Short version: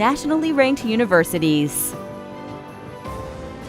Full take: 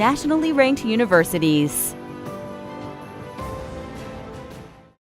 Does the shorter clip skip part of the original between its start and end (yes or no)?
yes